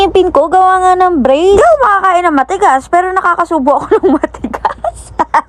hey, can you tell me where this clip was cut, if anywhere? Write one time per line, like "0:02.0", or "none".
none